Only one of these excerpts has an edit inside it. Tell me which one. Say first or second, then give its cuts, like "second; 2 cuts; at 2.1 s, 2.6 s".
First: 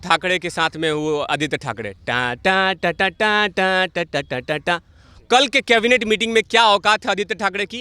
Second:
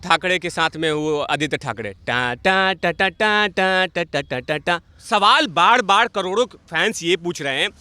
second; 1 cut; at 4.9 s